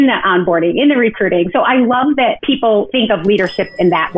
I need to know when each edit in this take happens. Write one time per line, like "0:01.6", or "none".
0:02.7

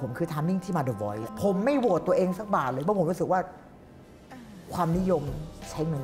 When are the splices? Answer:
0:01.3

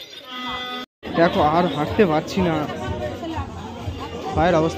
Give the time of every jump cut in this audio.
0:00.9

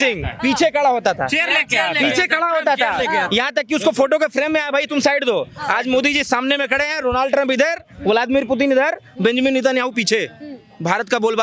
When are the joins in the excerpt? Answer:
none

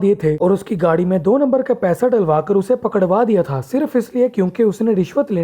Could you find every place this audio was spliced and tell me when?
none

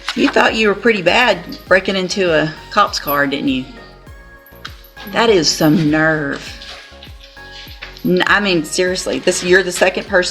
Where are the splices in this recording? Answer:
none

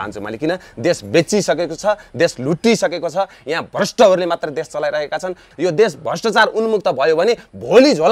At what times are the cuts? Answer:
0:05.5

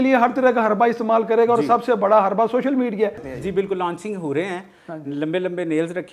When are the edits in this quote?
0:03.3

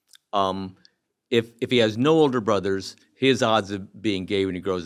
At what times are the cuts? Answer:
none

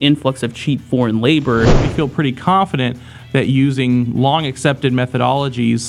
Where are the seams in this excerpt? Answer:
0:01.8

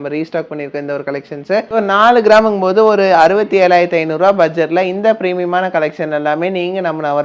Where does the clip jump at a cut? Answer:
0:01.7

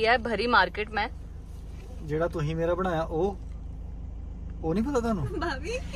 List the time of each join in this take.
none

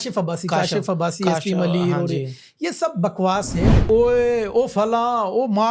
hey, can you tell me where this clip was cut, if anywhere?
0:03.8

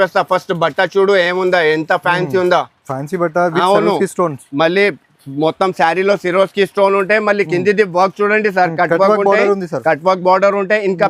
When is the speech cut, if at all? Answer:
none

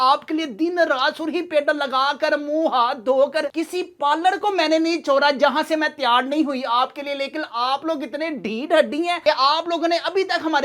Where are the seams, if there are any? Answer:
none

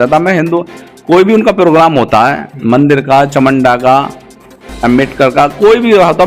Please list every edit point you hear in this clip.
none

